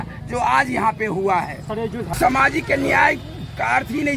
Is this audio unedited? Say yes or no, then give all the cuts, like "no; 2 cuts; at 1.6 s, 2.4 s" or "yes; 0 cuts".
no; 1 cut; at 2.1 s